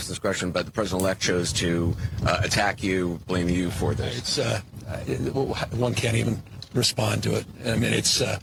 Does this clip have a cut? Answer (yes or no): no